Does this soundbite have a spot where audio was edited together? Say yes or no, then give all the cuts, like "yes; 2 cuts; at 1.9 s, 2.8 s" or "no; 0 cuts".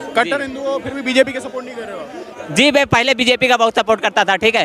no; 0 cuts